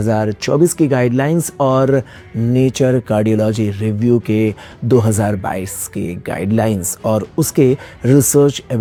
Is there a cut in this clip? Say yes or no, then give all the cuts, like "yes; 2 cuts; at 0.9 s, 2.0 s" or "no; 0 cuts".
no; 0 cuts